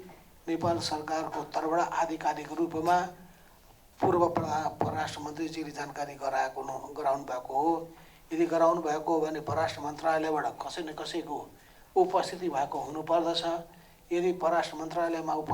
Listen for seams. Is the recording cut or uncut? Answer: uncut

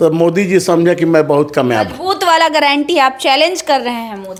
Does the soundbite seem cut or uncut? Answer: uncut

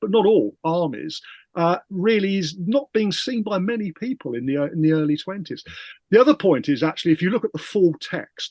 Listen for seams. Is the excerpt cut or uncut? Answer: uncut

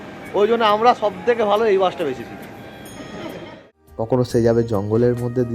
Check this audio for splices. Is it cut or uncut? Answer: cut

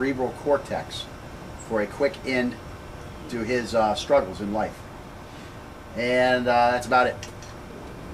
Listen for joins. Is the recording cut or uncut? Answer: uncut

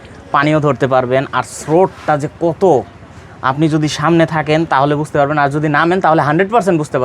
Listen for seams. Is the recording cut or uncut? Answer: uncut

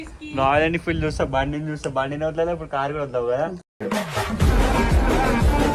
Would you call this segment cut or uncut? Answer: uncut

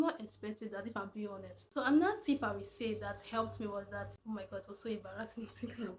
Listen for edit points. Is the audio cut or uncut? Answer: cut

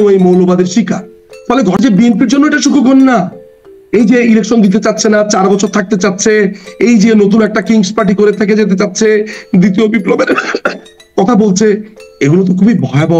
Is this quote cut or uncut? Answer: cut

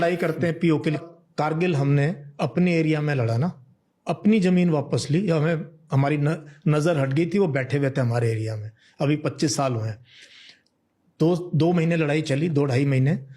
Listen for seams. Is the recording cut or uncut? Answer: cut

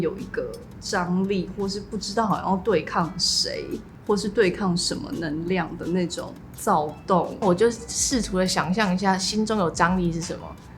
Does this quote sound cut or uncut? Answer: cut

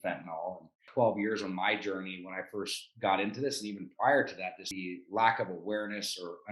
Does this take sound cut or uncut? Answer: cut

